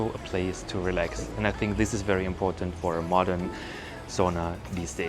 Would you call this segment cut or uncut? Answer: uncut